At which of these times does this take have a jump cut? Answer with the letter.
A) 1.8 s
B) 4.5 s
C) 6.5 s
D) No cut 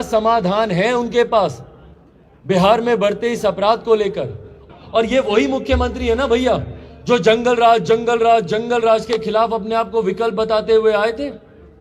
B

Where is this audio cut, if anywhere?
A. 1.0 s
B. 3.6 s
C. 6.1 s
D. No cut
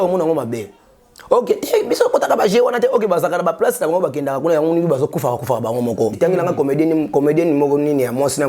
C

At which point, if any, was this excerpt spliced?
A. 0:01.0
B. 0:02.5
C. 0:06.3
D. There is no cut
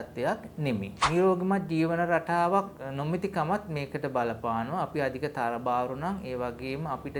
A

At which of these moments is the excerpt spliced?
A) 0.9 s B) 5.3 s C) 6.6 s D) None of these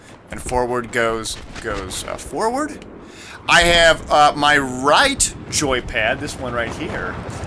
D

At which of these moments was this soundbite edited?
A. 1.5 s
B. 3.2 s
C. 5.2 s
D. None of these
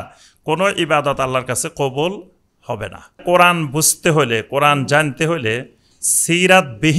B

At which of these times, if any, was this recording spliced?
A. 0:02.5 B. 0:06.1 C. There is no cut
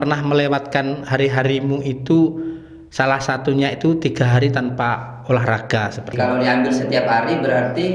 B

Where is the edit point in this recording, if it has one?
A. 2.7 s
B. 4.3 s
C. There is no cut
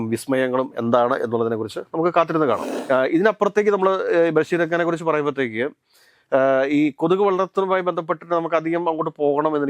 A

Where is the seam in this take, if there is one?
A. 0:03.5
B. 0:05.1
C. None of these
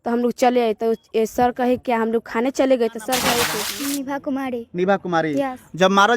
A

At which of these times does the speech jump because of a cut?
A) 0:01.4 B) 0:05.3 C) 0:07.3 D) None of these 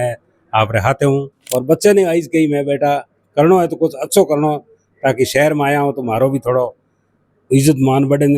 A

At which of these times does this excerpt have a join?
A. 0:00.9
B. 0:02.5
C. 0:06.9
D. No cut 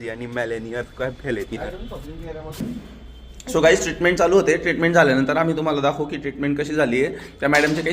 B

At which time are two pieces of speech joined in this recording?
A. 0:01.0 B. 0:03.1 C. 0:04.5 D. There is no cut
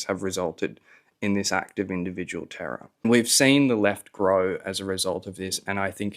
B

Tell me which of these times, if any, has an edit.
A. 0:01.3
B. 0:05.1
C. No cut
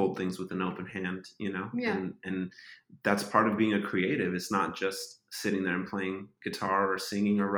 C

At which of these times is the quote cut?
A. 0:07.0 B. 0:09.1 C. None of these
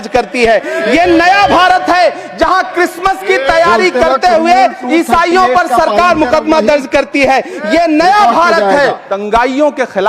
B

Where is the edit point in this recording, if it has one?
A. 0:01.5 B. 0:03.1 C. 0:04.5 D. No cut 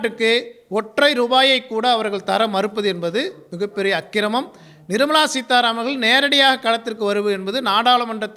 D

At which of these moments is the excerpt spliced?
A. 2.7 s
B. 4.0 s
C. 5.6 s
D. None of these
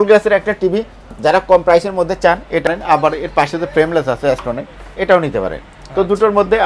A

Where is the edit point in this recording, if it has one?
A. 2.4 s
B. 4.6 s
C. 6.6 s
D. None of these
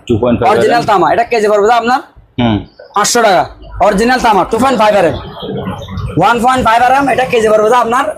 B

